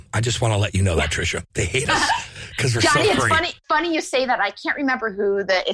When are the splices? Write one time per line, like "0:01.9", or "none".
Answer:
0:01.4
0:03.6